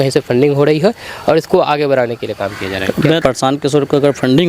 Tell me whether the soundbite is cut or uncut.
cut